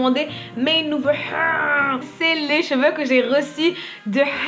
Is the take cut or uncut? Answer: cut